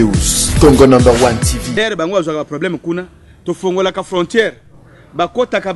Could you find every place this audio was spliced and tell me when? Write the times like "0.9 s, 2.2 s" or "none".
1.8 s